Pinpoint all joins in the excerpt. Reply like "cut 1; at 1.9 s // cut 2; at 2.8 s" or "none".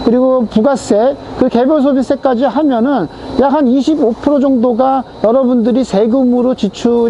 none